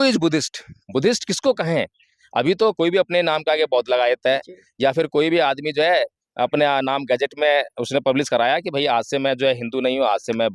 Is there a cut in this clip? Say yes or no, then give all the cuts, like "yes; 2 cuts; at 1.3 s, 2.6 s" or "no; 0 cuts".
yes; 1 cut; at 2.8 s